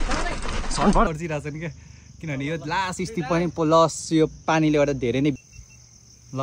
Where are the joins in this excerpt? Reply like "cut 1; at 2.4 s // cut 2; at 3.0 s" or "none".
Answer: cut 1; at 1.1 s // cut 2; at 5.4 s